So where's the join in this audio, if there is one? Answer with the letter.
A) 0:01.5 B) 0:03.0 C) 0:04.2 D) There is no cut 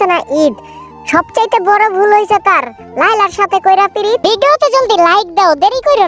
C